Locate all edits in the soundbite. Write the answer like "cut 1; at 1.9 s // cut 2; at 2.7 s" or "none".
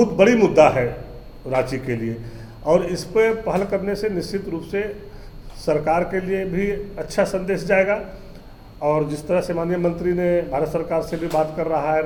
none